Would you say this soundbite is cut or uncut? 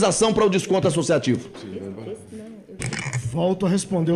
uncut